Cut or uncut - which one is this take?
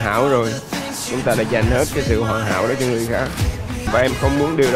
cut